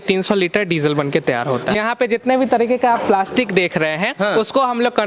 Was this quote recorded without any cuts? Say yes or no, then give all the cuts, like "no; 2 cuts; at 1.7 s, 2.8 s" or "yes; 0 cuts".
no; 1 cut; at 1.7 s